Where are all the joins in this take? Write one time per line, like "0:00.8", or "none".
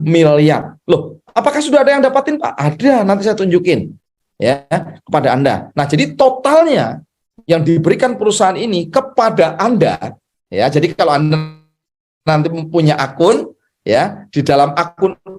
none